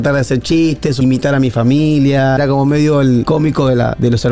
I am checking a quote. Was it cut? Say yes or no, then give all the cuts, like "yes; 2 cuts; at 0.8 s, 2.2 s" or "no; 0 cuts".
yes; 3 cuts; at 1.0 s, 2.4 s, 3.2 s